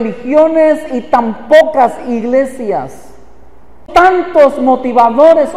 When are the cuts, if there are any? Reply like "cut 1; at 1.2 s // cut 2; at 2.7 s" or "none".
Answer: cut 1; at 3.8 s

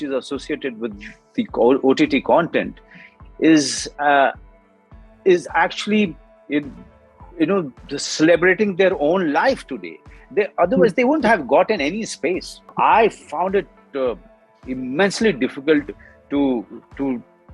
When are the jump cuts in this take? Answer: cut 1; at 12.6 s

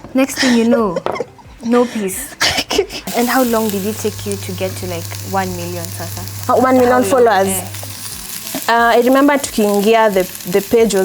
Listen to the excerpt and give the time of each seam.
cut 1; at 3.1 s

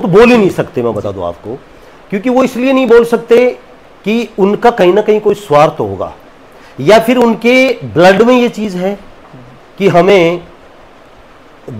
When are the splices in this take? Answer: none

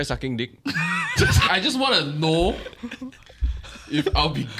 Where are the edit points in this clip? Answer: cut 1; at 1.4 s

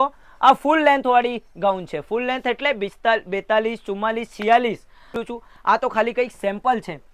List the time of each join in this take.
cut 1; at 5.2 s

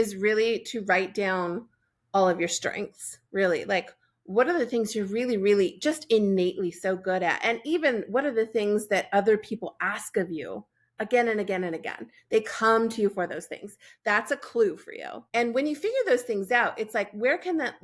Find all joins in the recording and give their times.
cut 1; at 15.3 s

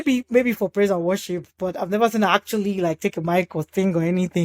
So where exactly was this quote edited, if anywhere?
none

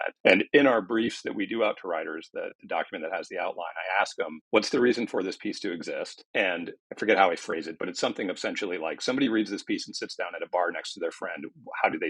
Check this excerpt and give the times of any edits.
cut 1; at 6.2 s

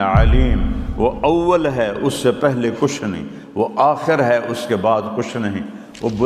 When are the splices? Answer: none

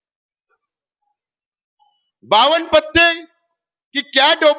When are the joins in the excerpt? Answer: none

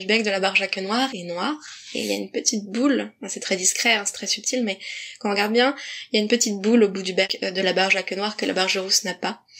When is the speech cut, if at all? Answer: none

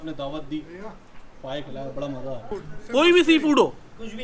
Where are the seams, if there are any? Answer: cut 1; at 2.4 s

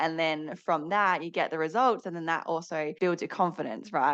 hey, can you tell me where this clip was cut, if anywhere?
cut 1; at 2.9 s

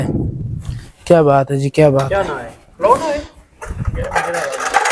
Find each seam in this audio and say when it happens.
none

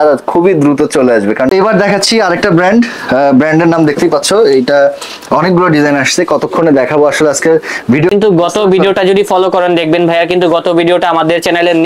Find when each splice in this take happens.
cut 1; at 1.5 s // cut 2; at 8.1 s

